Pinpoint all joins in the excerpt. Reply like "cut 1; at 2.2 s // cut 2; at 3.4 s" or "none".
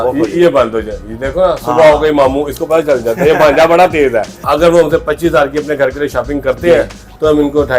cut 1; at 4.5 s